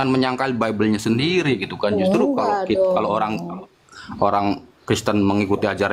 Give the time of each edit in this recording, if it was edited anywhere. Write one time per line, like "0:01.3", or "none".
none